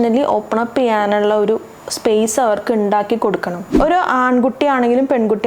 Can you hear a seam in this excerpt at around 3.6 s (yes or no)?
yes